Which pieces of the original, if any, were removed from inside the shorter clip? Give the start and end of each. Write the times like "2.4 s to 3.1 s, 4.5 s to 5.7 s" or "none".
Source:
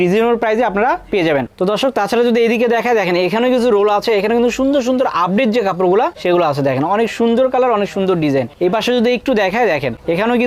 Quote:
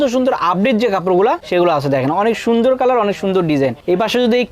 none